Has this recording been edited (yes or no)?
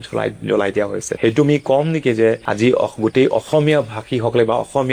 yes